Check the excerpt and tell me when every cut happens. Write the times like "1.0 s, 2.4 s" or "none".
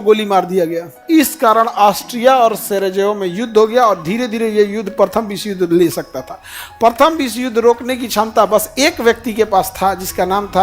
1.0 s